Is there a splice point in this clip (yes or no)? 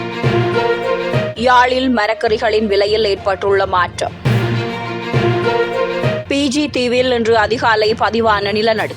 yes